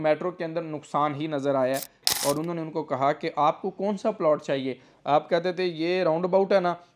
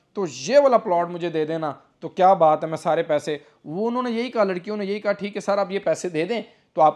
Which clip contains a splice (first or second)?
first